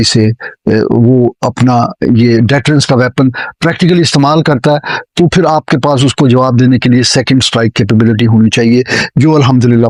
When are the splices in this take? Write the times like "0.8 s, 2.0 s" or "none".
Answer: none